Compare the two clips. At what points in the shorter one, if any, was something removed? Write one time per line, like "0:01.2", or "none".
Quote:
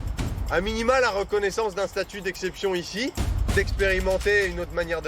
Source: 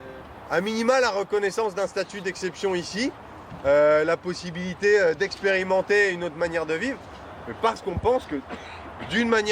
0:03.5